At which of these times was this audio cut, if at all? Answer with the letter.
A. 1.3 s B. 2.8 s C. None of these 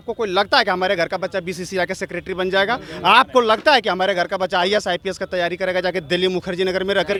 C